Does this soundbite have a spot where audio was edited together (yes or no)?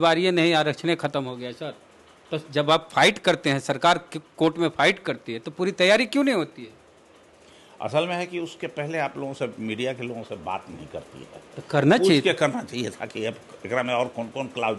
no